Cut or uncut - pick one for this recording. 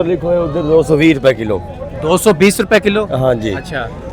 uncut